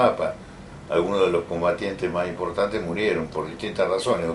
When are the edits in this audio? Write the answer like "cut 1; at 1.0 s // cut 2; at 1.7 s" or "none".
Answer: cut 1; at 1.8 s

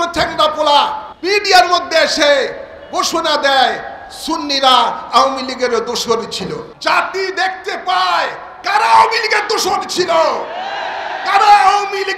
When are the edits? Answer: cut 1; at 1.1 s // cut 2; at 6.7 s

